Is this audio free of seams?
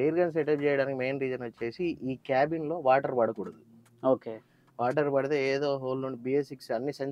yes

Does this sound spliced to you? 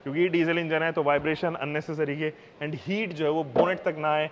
no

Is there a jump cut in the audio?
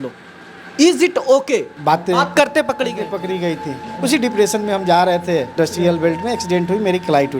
yes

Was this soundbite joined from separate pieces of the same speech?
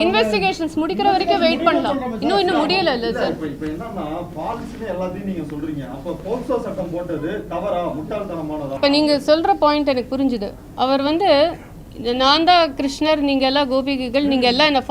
yes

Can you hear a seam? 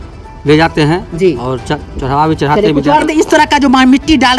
yes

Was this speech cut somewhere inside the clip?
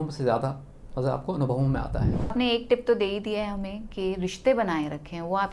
yes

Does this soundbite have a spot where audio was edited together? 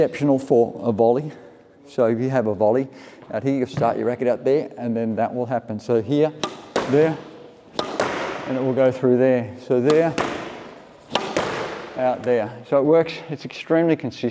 no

